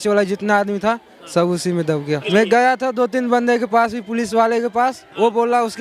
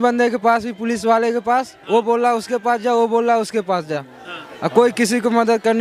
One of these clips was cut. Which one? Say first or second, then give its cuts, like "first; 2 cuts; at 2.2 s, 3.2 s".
first; 1 cut; at 2.2 s